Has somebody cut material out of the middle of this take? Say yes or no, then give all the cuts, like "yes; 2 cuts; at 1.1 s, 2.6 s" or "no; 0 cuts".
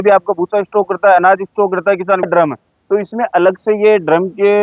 yes; 1 cut; at 2.3 s